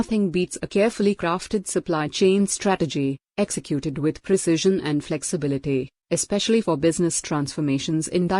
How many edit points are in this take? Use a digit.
1